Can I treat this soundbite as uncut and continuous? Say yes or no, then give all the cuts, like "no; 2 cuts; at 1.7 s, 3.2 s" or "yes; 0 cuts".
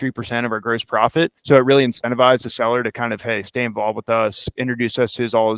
no; 1 cut; at 1.4 s